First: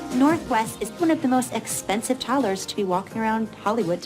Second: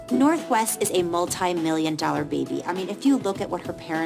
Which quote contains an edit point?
first; 1 cut; at 1.0 s

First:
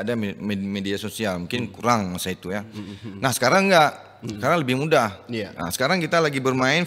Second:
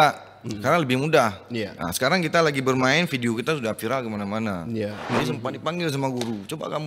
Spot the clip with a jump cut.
second; 1 cut; at 5.0 s

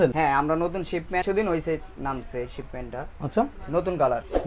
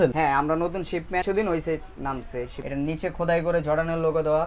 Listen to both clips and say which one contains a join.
second; 1 cut; at 2.6 s

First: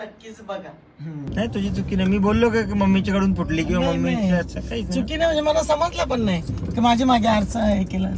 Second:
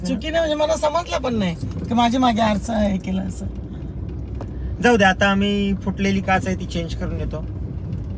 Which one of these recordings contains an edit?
first; 1 cut; at 1.3 s

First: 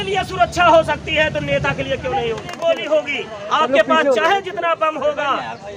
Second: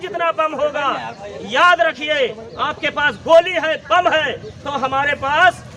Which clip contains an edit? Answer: first; 1 cut; at 2.5 s

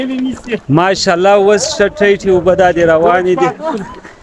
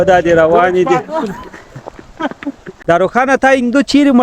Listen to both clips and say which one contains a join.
second; 1 cut; at 2.6 s

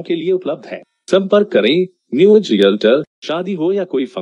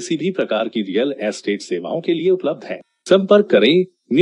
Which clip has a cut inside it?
first; 1 cut; at 3.2 s

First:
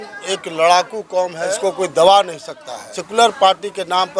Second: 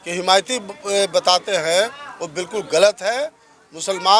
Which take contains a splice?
first; 2 cuts; at 1.4 s, 3.0 s

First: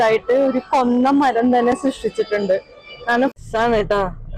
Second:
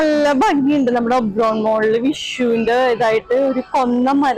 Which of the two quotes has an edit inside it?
first; 1 cut; at 3.3 s

